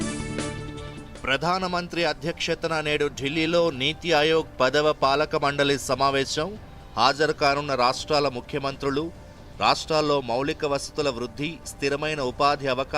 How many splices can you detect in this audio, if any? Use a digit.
1